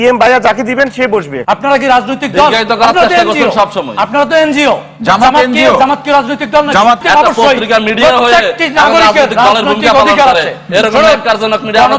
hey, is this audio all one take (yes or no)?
no